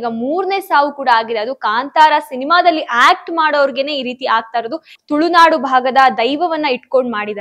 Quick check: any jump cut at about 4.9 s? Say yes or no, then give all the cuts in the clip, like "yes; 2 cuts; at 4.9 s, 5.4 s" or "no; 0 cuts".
yes; 1 cut; at 4.9 s